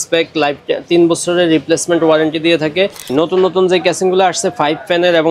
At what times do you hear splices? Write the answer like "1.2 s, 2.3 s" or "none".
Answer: 3.1 s